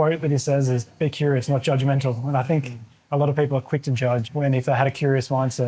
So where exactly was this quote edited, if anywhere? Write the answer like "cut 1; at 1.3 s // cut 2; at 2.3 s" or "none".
cut 1; at 4.3 s